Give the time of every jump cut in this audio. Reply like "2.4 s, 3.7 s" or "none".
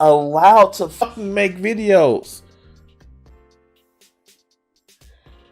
1.1 s